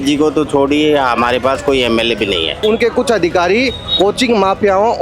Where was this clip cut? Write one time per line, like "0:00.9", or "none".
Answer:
0:02.6